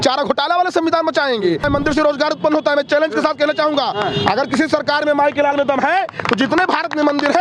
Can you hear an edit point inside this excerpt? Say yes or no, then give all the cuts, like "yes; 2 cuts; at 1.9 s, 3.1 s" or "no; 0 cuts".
yes; 1 cut; at 1.6 s